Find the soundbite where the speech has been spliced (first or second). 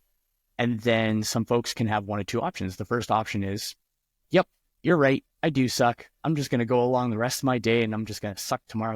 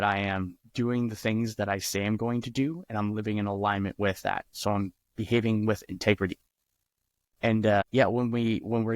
second